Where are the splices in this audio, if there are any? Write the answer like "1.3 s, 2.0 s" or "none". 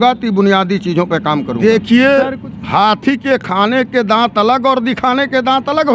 1.5 s